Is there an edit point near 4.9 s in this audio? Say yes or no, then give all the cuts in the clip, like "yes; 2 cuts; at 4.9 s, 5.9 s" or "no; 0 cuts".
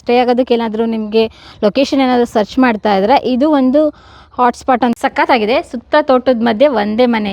yes; 1 cut; at 4.9 s